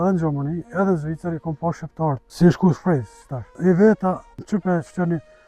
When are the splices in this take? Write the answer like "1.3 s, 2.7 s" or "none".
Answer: 2.3 s, 3.5 s, 4.4 s

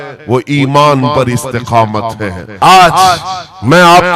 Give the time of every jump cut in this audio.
2.4 s

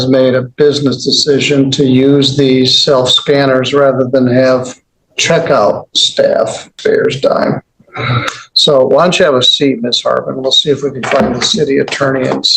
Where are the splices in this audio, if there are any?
6.6 s

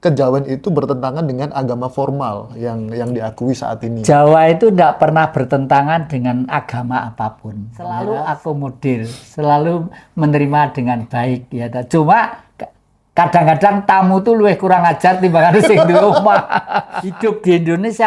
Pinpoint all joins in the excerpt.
7.8 s, 17.0 s

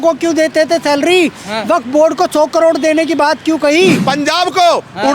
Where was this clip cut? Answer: 4.0 s

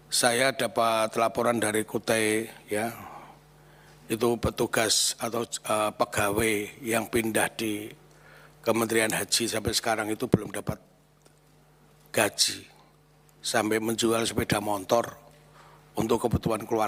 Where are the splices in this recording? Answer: none

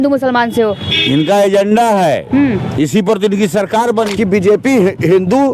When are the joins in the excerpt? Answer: 4.1 s

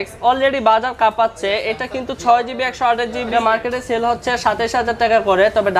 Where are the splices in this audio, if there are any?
3.2 s

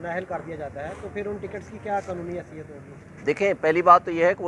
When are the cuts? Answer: none

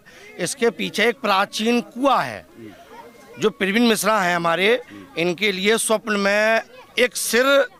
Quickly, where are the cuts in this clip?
none

